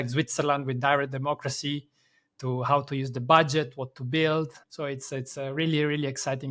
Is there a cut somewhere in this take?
yes; 1 cut; at 4.6 s

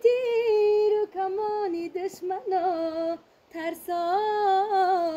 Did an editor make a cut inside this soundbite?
no; 0 cuts

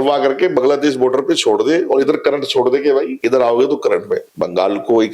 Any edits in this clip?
yes; 2 cuts; at 3.2 s, 4.3 s

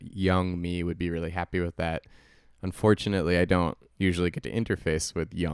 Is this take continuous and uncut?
yes; 0 cuts

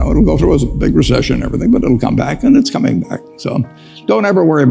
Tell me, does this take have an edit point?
no; 0 cuts

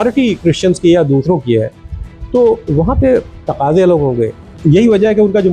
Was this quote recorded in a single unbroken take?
no; 1 cut; at 4.4 s

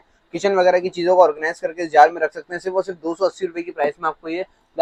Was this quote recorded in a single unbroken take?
yes; 0 cuts

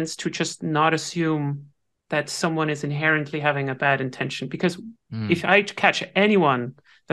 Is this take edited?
no; 0 cuts

